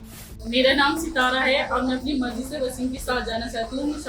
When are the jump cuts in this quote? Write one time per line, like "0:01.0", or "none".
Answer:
none